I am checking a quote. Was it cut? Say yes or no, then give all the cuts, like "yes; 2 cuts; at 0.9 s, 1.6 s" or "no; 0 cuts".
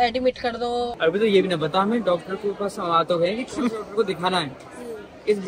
yes; 1 cut; at 0.9 s